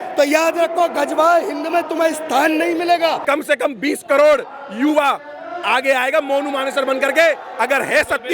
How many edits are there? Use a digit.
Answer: 1